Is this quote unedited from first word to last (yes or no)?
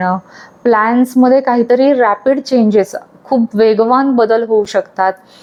yes